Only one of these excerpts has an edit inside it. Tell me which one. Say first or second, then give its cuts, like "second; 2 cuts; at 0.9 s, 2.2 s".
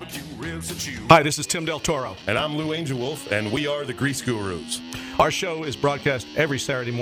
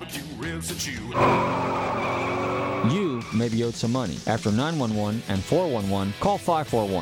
second; 1 cut; at 1.0 s